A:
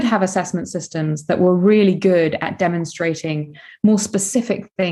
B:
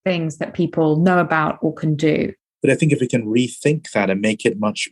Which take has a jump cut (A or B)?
B